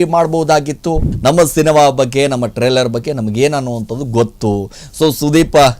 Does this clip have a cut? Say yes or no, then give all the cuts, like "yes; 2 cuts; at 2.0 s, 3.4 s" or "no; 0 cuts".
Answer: yes; 1 cut; at 1.1 s